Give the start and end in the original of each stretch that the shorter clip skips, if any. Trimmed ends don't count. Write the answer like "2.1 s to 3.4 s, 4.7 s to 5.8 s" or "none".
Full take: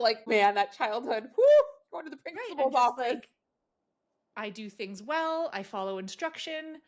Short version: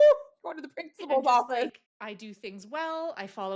3.4 s to 4.2 s